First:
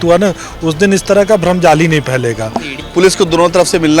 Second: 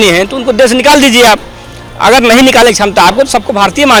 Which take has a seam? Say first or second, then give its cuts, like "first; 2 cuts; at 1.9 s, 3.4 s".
first; 1 cut; at 2.7 s